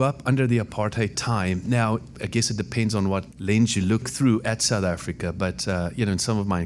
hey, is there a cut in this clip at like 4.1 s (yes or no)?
yes